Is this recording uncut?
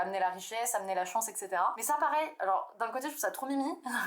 no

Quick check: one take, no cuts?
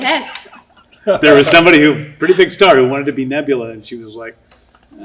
yes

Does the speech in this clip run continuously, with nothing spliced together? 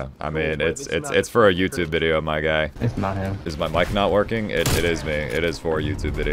yes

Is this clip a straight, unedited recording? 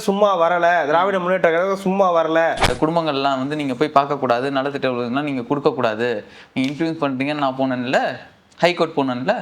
no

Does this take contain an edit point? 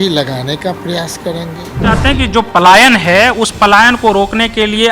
yes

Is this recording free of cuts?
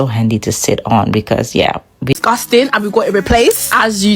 no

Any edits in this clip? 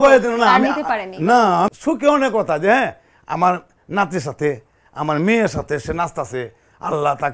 yes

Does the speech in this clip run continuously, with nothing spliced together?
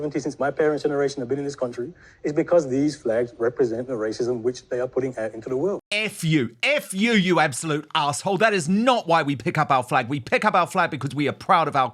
yes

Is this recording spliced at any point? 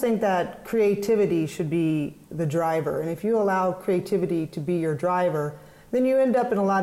no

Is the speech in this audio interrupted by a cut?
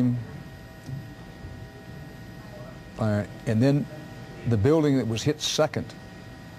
no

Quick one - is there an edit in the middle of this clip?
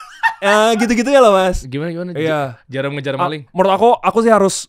yes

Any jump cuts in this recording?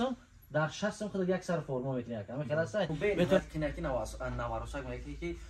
yes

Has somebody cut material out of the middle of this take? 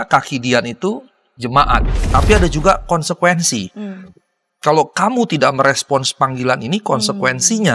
yes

